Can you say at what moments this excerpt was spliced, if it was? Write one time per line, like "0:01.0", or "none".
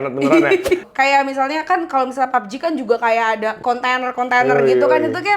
0:00.8
0:03.6